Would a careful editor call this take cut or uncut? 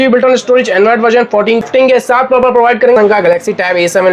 cut